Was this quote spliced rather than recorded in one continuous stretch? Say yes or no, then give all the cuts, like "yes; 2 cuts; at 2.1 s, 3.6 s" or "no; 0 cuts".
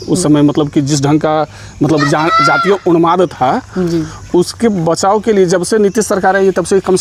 no; 0 cuts